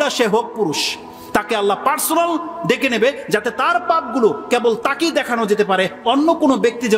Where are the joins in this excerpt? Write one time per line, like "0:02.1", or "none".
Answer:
none

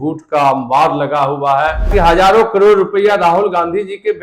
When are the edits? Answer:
0:01.9

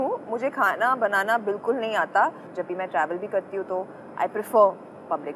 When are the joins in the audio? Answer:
0:02.5

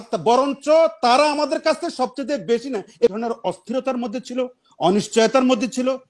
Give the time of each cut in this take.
0:03.1

